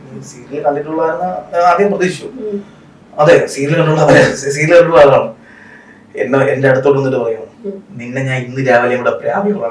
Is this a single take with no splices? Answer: yes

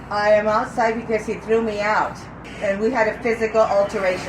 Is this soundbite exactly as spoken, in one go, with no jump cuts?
no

